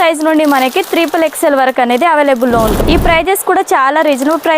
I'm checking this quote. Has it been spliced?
yes; 1 cut; at 2.8 s

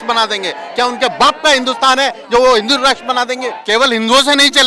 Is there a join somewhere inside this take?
yes; 1 cut; at 3.6 s

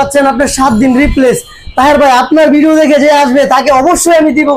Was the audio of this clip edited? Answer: no; 0 cuts

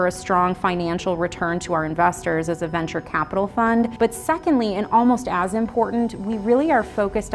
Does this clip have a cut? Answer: no; 0 cuts

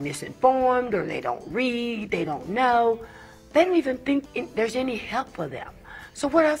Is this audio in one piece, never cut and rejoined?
no; 1 cut; at 4.3 s

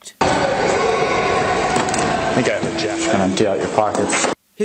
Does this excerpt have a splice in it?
no; 0 cuts

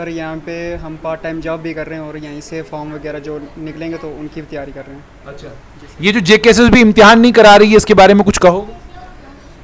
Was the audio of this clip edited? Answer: no; 0 cuts

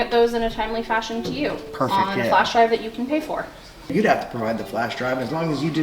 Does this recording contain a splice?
yes; 1 cut; at 3.9 s

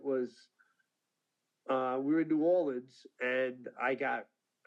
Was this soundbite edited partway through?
no; 0 cuts

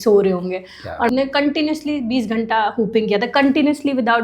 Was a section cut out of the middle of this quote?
yes; 1 cut; at 1.1 s

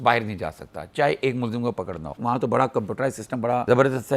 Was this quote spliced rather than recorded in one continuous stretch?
yes; 1 cut; at 2.1 s

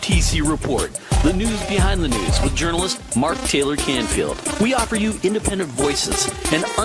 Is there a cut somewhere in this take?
yes; 1 cut; at 4.4 s

